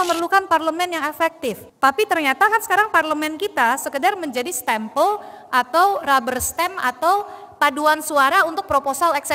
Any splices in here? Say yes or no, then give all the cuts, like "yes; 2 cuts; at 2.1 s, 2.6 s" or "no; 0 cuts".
yes; 1 cut; at 1.7 s